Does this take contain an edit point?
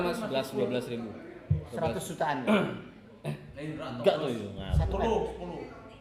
no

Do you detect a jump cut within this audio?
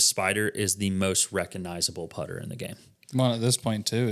no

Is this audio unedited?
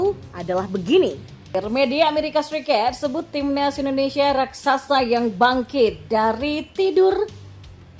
no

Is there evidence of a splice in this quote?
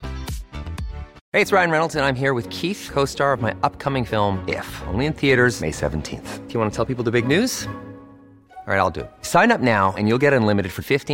yes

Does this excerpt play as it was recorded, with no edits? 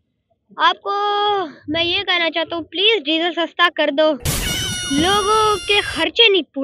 yes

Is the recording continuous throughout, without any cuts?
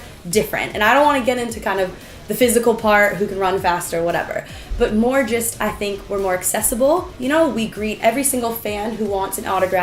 yes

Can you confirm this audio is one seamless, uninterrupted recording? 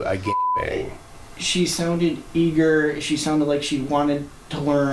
yes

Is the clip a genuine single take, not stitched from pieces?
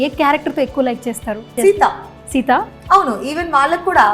no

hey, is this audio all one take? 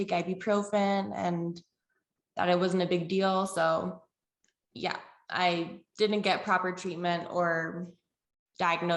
yes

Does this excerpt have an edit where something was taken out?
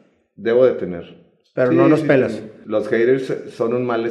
yes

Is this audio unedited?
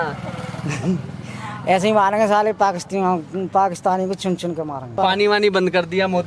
no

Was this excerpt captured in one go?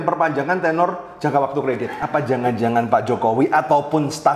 no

